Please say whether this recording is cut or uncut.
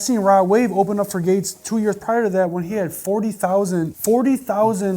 cut